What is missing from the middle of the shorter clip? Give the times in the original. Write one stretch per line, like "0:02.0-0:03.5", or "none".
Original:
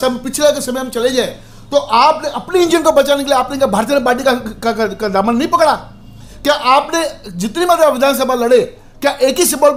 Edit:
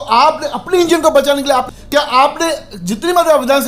0:03.5-0:06.2